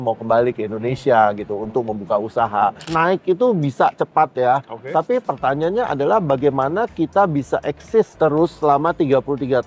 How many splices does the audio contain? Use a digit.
1